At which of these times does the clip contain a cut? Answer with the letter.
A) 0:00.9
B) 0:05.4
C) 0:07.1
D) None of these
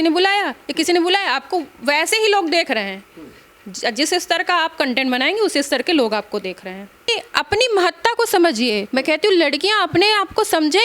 C